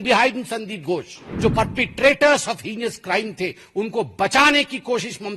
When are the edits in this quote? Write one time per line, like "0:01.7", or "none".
0:01.3